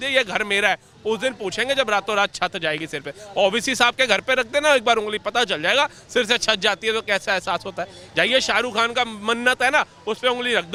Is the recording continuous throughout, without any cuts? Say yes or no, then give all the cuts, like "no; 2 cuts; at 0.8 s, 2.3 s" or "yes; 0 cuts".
yes; 0 cuts